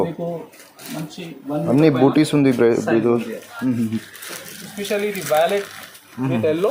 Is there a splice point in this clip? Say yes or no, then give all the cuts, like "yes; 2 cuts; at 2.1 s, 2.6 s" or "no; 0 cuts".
no; 0 cuts